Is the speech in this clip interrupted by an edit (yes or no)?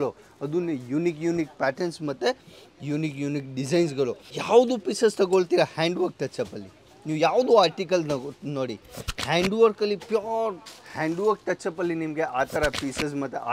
yes